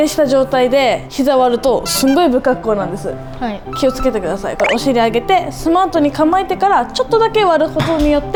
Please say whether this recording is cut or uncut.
uncut